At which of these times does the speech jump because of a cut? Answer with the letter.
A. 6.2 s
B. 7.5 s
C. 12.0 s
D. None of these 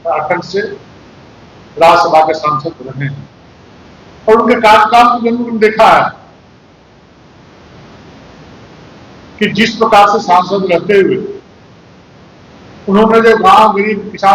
D